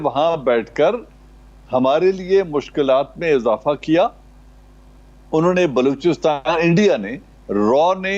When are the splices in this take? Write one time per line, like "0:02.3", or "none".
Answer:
none